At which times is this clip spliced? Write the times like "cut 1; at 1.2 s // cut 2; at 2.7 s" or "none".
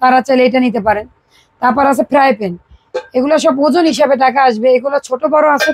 none